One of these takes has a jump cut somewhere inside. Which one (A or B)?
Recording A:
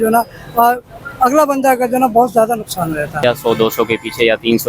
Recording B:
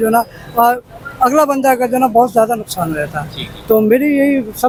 A